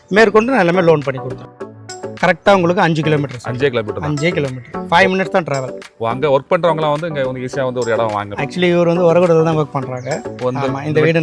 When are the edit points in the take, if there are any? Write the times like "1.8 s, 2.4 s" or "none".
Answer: 1.8 s